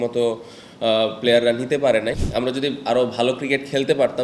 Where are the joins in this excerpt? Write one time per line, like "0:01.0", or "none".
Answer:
0:02.2